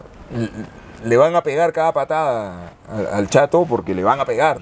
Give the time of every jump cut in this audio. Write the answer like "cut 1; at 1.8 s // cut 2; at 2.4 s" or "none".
none